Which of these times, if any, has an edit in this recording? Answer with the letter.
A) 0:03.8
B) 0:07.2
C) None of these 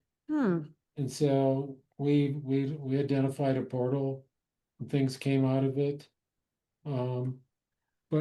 C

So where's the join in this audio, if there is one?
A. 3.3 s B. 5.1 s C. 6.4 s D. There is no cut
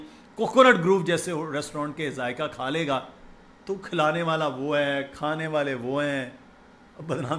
D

